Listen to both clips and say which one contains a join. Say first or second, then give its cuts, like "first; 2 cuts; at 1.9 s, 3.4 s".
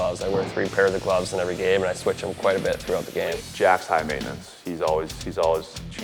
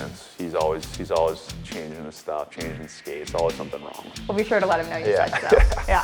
first; 1 cut; at 3.3 s